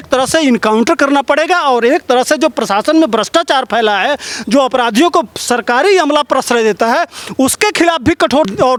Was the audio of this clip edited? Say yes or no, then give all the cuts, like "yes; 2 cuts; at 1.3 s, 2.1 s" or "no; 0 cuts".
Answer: no; 0 cuts